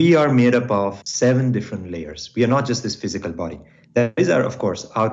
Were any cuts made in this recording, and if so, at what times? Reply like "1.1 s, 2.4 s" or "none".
1.0 s